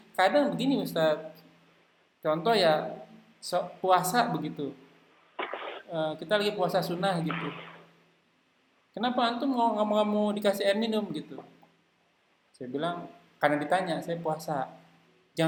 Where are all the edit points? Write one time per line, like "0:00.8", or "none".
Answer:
none